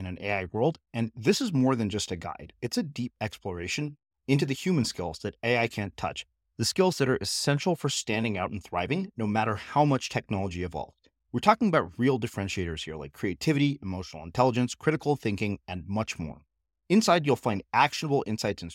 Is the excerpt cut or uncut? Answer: uncut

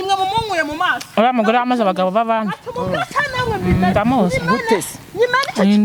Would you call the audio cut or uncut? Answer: uncut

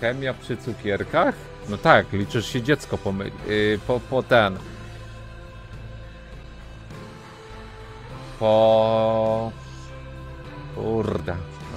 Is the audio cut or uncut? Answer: uncut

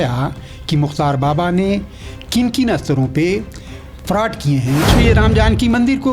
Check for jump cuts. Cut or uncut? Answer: cut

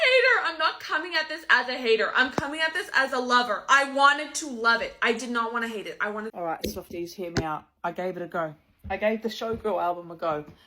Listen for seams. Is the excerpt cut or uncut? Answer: cut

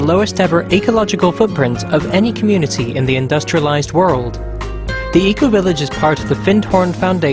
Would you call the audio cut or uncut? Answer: uncut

